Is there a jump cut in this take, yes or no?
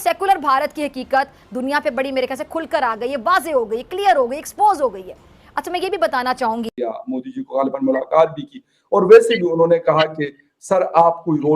yes